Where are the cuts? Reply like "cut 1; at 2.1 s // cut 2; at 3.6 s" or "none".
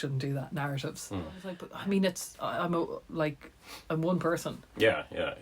cut 1; at 1.7 s